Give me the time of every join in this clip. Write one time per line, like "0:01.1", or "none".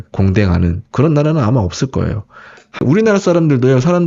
0:02.8